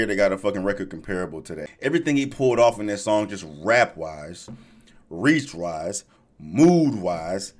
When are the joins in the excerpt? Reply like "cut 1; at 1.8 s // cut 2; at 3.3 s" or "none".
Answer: cut 1; at 1.5 s